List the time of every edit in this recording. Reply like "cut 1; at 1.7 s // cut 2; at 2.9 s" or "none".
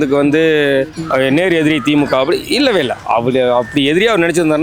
cut 1; at 1.0 s